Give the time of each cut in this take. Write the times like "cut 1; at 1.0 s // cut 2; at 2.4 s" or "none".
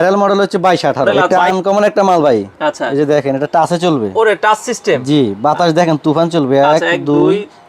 cut 1; at 1.1 s